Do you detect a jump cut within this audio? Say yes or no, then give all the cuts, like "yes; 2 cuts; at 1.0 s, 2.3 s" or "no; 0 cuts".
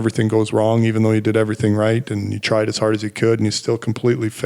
no; 0 cuts